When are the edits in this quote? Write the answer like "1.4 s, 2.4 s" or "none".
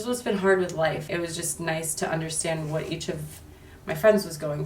1.0 s